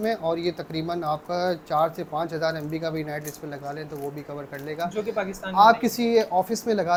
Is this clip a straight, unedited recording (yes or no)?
yes